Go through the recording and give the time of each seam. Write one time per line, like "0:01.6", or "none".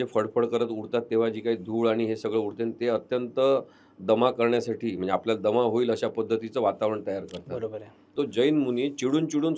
0:08.1